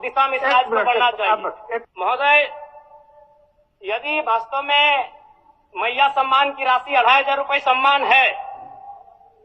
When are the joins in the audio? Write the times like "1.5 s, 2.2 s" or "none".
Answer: 1.9 s